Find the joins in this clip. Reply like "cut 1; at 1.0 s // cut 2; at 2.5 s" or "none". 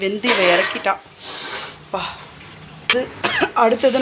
cut 1; at 2.9 s